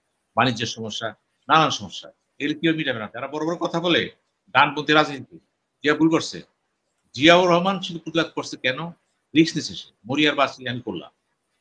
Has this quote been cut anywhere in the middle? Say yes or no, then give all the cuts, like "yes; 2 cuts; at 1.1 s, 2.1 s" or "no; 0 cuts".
yes; 1 cut; at 3.2 s